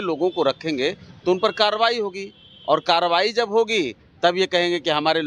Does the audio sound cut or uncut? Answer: uncut